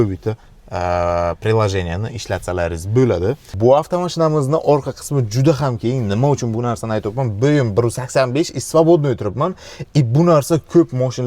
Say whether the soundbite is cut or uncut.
cut